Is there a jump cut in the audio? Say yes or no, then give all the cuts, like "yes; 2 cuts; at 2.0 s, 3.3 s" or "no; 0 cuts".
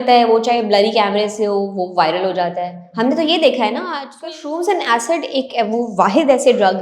yes; 1 cut; at 4.0 s